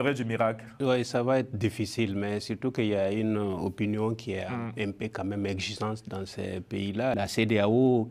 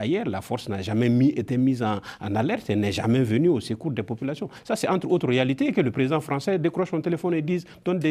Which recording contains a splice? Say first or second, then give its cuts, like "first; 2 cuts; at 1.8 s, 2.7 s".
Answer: first; 1 cut; at 7.1 s